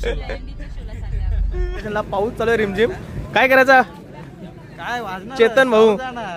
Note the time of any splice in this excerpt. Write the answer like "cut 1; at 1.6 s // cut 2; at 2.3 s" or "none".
cut 1; at 1.8 s